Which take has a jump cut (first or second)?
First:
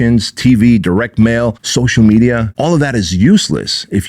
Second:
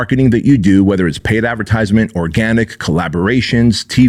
first